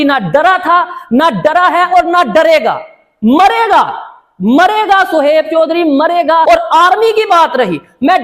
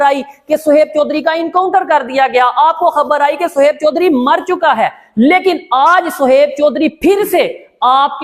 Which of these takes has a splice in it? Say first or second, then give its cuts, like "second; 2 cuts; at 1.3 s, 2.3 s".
first; 1 cut; at 6.4 s